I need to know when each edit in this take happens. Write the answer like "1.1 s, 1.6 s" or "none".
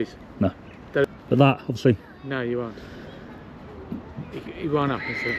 1.0 s